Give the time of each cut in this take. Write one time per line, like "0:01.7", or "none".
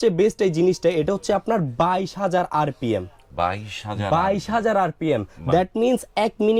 none